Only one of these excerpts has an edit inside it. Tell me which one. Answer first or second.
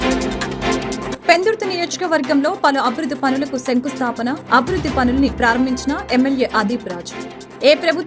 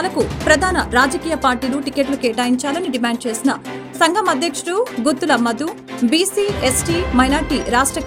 first